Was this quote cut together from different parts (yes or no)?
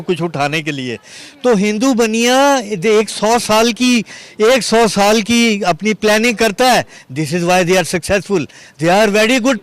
yes